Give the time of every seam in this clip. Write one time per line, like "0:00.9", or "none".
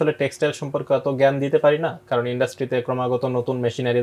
none